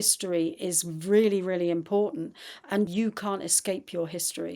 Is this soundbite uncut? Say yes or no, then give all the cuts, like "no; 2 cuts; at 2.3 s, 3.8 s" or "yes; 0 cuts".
no; 1 cut; at 2.9 s